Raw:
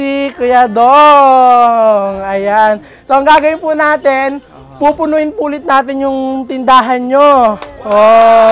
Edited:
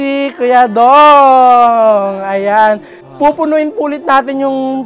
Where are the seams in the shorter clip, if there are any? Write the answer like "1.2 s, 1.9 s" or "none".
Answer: 2.9 s